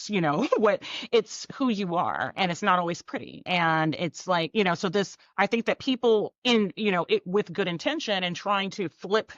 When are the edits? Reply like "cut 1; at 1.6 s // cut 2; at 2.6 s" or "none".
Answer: cut 1; at 3.5 s // cut 2; at 5.2 s // cut 3; at 6.3 s